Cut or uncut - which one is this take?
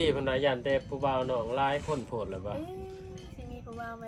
uncut